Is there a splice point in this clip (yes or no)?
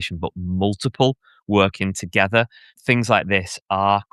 yes